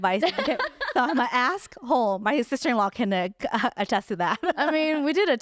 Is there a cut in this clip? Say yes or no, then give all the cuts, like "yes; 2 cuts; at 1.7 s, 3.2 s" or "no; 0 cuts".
no; 0 cuts